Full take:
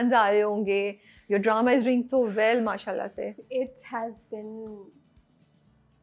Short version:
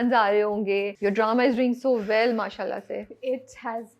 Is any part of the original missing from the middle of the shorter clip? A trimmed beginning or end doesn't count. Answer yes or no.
yes